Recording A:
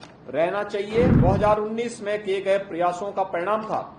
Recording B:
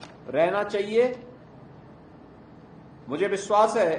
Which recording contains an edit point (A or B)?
A